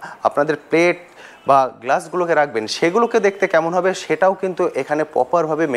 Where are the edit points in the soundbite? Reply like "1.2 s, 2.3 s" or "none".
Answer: none